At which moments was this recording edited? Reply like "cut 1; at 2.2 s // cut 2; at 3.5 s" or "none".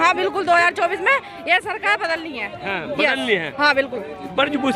none